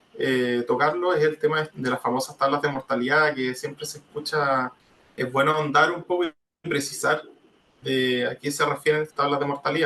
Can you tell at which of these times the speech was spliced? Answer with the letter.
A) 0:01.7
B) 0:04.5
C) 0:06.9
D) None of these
A